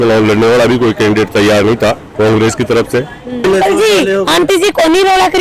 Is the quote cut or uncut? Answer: cut